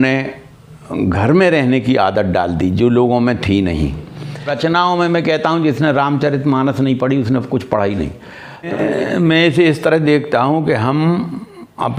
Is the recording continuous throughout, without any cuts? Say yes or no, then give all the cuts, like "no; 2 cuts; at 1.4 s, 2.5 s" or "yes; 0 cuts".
no; 2 cuts; at 4.5 s, 8.6 s